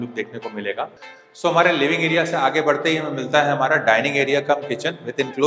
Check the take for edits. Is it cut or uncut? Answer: cut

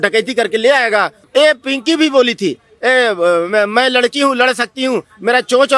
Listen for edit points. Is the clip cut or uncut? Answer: cut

